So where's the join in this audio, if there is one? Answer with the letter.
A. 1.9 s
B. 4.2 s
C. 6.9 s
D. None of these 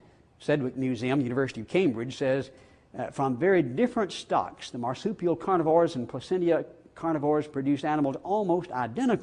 B